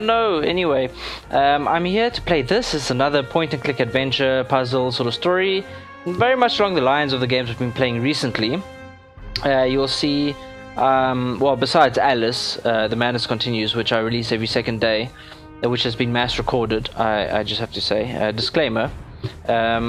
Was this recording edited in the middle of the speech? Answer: no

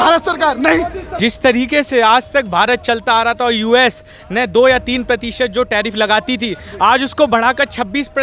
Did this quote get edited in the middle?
yes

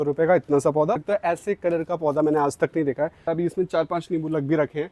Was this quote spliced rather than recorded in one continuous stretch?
yes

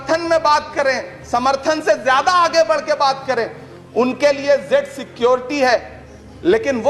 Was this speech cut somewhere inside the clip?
no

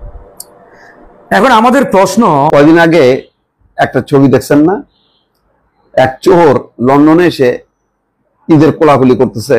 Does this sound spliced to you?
yes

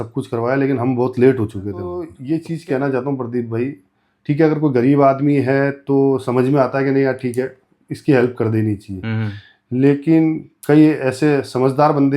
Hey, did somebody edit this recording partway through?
yes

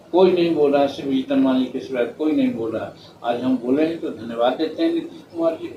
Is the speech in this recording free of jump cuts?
yes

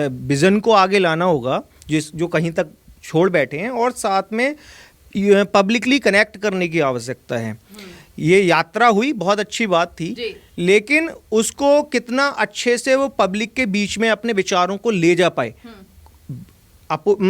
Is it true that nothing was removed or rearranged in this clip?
yes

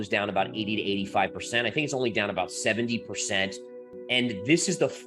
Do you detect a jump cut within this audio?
yes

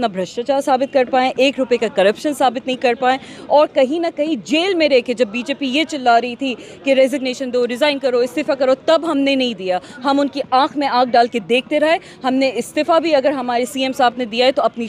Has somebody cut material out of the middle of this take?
no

